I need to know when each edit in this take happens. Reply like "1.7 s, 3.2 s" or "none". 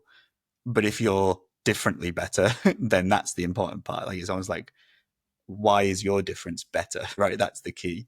7.2 s